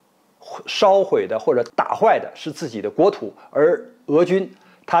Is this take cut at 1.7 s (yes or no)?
yes